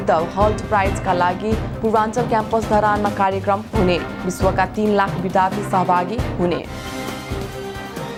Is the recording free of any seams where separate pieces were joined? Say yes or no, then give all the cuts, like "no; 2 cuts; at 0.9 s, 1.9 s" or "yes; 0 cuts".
yes; 0 cuts